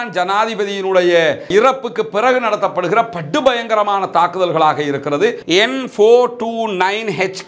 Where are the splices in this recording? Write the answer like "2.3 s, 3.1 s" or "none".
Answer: 5.4 s